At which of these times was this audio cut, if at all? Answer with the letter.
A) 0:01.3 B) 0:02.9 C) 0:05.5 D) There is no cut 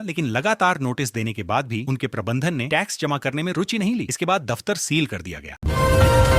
C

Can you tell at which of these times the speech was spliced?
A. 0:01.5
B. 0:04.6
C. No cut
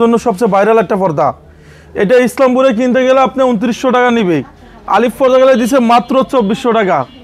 C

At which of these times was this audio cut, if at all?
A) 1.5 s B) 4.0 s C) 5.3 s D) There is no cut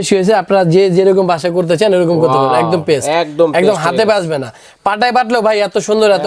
D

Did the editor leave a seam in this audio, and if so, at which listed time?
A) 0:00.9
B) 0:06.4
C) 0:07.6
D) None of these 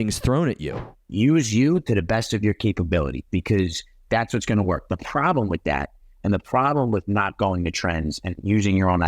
A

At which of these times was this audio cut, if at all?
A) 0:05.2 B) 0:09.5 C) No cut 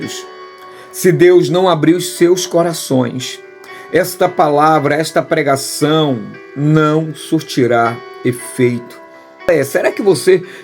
B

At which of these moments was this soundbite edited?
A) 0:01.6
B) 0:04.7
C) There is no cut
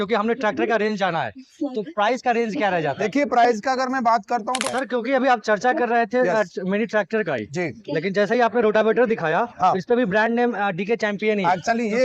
B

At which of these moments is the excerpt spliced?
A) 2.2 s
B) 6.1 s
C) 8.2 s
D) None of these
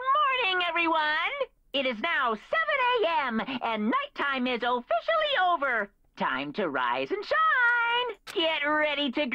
C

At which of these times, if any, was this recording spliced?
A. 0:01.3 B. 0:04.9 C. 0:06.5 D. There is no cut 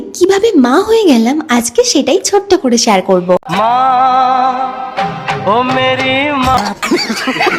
D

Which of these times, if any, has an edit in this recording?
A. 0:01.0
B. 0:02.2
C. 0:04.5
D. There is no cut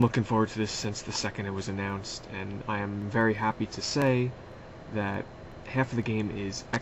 D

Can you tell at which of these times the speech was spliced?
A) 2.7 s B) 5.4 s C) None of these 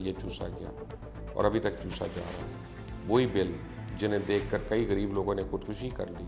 C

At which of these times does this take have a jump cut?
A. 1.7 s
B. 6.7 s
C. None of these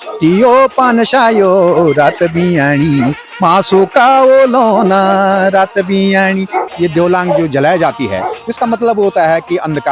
B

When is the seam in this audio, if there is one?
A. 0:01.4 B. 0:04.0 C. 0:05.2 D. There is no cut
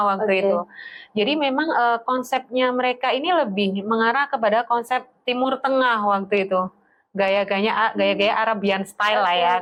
D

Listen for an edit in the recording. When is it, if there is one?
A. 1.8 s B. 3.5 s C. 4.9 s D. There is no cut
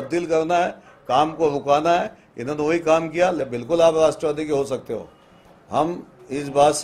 B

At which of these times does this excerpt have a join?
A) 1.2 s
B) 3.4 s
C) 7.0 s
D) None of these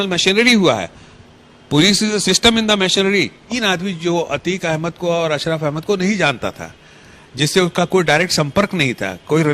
B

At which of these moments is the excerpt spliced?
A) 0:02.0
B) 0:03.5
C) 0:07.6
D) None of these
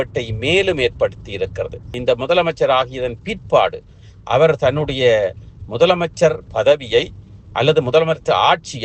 A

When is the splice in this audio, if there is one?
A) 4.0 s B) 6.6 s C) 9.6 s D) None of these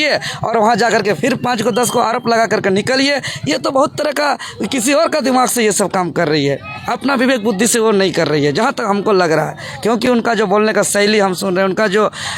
D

